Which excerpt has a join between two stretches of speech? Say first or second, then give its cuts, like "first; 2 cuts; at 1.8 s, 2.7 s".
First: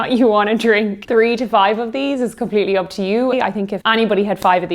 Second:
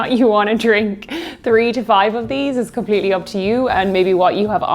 first; 2 cuts; at 1.0 s, 3.3 s